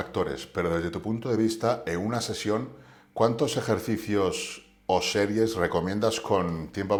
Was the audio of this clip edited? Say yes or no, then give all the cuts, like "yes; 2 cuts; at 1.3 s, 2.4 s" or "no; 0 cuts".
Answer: no; 0 cuts